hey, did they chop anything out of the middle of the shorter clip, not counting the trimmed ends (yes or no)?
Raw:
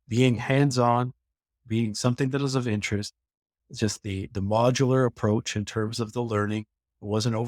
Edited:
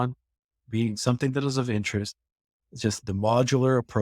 yes